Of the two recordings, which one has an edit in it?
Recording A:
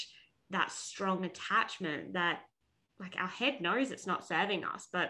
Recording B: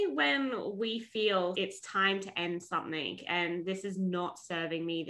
B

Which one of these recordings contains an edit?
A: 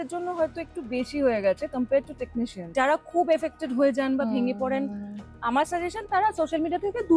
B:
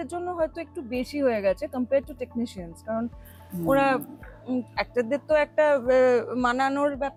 A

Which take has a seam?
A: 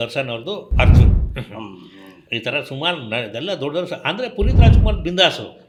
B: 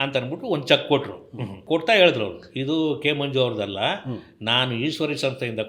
B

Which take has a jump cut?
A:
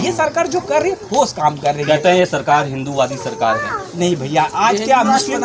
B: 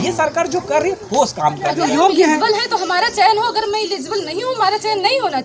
B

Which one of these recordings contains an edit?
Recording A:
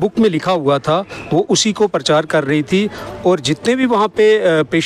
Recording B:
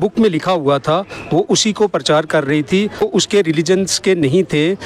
B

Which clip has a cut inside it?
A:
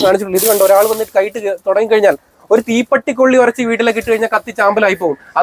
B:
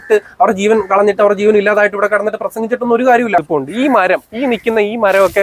B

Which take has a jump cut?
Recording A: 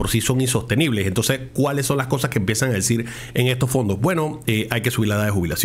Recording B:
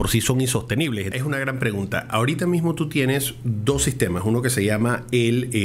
B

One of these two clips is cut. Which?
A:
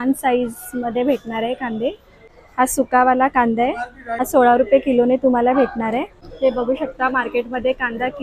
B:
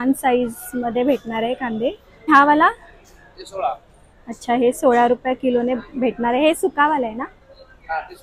A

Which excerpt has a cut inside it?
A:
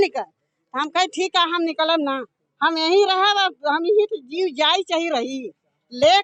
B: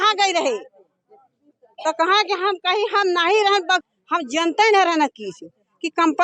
B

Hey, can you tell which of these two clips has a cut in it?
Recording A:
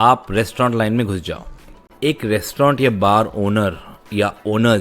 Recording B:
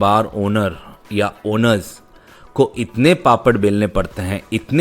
A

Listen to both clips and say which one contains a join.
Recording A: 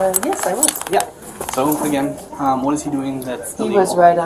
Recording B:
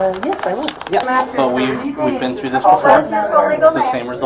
B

